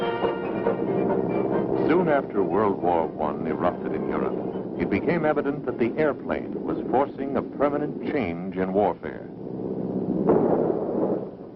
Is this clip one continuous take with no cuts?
no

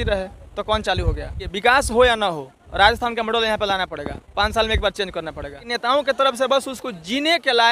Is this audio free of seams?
no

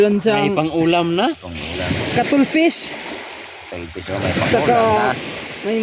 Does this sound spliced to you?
no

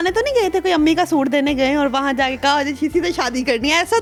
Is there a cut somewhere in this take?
no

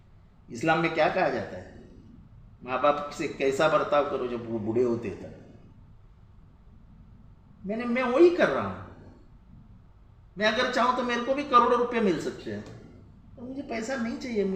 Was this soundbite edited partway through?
no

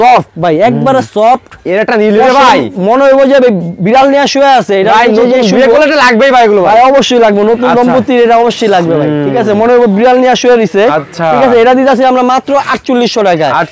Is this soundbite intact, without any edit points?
yes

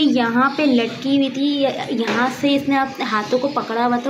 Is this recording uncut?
yes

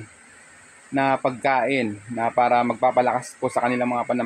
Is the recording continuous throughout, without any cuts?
yes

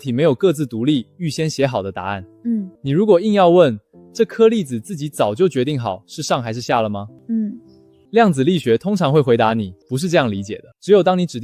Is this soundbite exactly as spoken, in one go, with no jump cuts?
yes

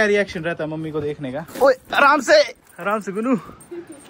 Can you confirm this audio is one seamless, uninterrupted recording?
no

